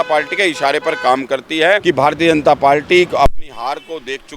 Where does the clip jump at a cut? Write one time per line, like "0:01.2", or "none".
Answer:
0:01.8

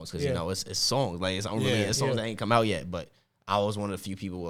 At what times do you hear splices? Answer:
none

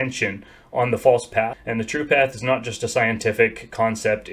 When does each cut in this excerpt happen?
0:01.6

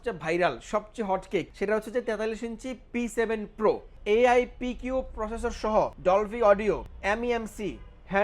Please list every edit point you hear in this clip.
0:01.5
0:03.9
0:06.0

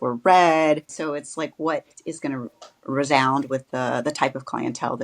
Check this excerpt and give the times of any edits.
0:00.9

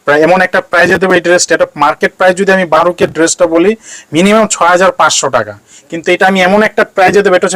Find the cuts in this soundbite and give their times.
none

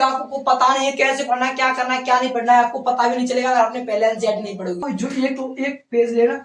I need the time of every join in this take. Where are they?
0:04.8

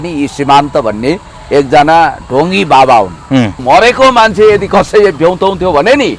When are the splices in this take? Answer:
0:03.6

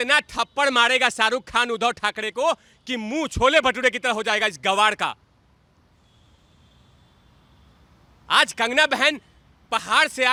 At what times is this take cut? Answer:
none

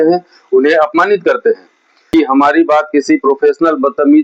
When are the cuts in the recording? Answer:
0:02.0

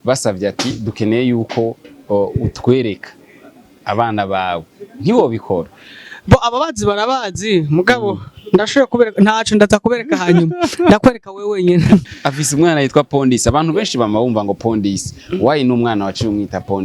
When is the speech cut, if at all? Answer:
0:12.0

